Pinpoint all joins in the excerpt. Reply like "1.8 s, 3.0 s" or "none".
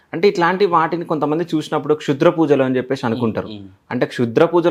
none